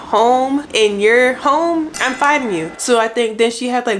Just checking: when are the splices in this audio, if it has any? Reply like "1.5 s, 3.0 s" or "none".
2.7 s